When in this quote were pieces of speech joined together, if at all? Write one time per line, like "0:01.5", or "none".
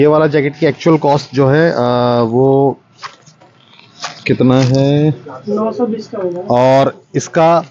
0:05.3